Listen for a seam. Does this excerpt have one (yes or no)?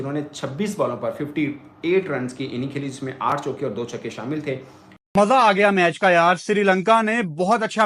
yes